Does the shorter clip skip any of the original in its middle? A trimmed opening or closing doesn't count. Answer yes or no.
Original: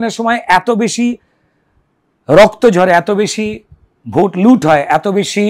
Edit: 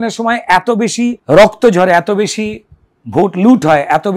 yes